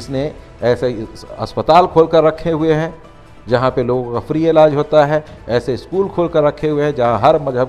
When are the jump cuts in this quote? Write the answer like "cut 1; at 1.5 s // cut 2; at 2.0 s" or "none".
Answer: none